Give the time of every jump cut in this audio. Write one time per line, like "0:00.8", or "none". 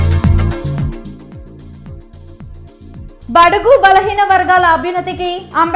0:02.1